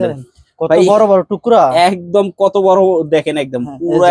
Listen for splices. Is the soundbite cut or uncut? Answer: uncut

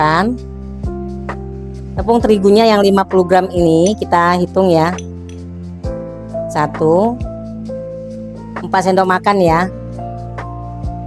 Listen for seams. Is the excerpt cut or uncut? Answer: cut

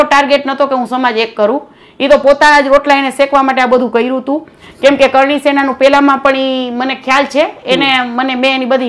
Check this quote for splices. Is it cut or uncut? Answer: uncut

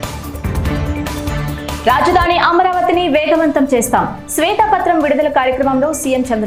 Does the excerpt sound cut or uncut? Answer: uncut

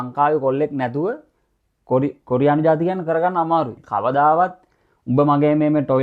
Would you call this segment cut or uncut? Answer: cut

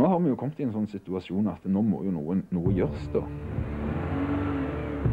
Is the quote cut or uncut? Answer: uncut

